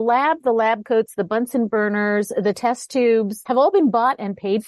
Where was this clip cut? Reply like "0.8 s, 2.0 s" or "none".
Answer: 3.4 s